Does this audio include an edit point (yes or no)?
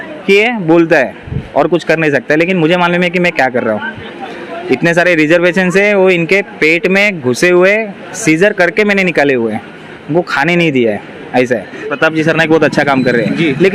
yes